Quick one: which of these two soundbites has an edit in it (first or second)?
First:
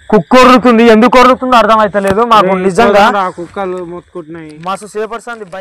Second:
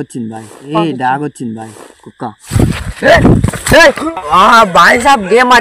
second